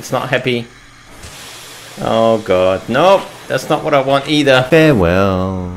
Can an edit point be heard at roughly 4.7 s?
yes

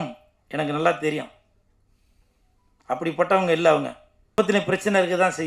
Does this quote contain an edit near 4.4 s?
yes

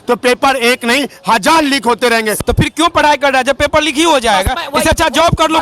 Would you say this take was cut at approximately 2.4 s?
yes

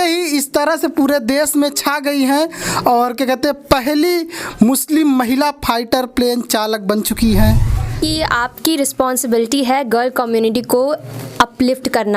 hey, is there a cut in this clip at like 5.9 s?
no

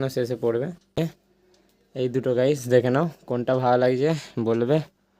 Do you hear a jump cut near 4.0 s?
no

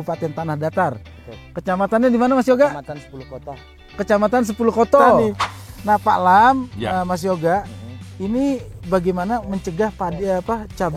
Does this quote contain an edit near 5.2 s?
yes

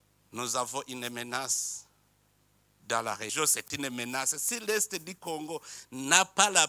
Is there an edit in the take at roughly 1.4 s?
no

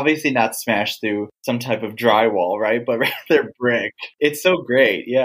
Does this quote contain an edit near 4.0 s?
yes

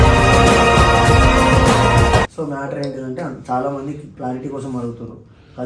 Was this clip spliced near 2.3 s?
yes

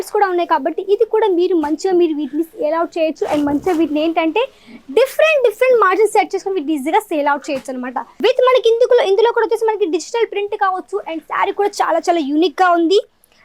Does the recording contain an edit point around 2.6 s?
no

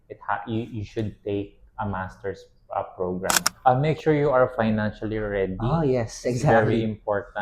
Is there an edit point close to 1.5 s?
no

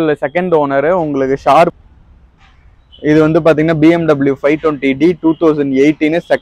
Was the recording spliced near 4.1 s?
no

